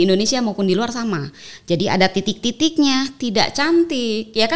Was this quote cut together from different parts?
no; 0 cuts

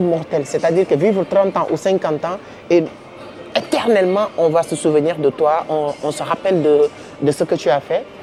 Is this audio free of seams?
yes; 0 cuts

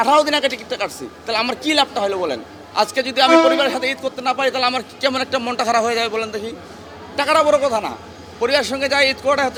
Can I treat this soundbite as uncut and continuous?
yes; 0 cuts

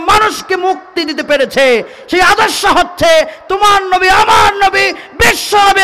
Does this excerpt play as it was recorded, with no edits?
yes; 0 cuts

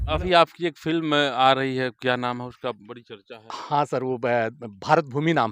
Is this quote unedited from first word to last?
yes; 0 cuts

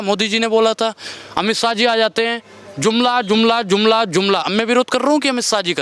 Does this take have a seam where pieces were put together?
no; 0 cuts

